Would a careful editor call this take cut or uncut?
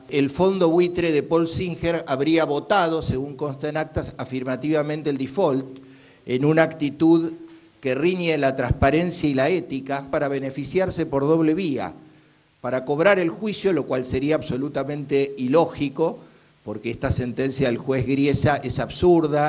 cut